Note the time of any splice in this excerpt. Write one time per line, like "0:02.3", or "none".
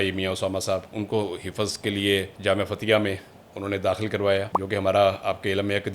0:02.3
0:04.6